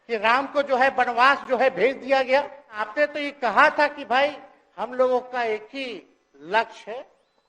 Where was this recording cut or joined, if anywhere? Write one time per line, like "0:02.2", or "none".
0:02.9